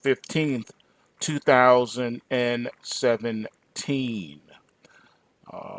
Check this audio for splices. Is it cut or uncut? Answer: uncut